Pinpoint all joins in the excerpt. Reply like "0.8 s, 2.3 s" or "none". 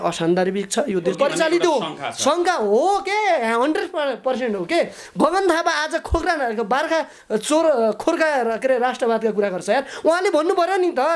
1.1 s

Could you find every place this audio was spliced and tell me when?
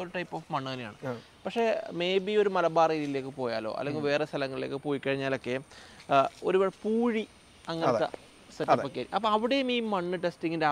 none

